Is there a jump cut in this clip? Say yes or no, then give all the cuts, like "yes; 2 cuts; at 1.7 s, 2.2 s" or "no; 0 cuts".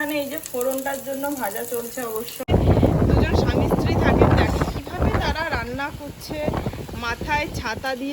yes; 1 cut; at 2.5 s